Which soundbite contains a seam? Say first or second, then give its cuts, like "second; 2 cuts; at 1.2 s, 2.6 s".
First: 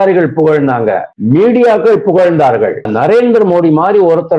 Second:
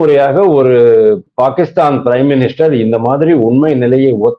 first; 2 cuts; at 1.1 s, 2.9 s